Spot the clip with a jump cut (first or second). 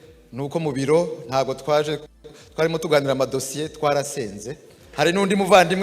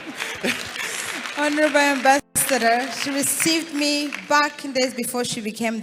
first